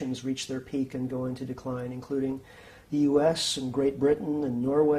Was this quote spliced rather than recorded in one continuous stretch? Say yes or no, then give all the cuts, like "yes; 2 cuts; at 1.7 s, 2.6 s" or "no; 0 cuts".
yes; 1 cut; at 0.9 s